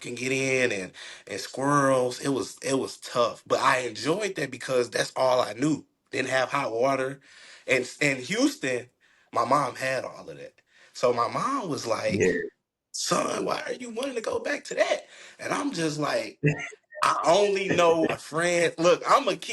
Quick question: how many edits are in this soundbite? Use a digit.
1